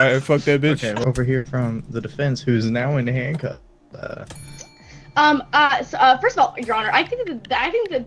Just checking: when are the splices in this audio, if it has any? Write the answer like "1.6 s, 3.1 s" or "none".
1.0 s